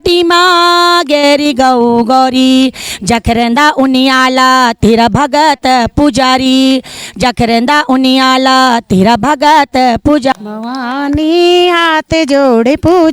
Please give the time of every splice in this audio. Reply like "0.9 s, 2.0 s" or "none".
10.3 s

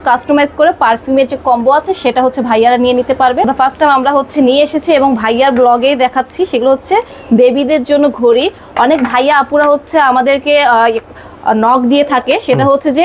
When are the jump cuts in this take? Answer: 3.5 s

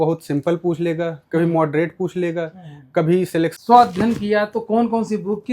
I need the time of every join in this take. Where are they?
3.5 s

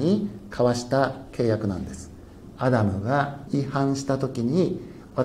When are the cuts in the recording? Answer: 2.4 s, 3.4 s

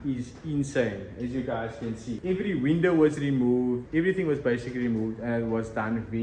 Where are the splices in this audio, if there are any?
none

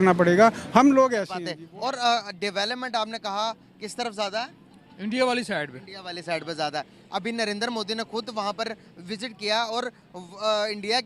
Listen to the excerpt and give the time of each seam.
1.3 s

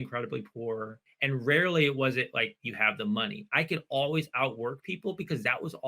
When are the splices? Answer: 1.0 s

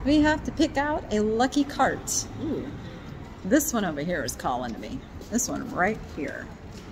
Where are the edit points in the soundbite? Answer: none

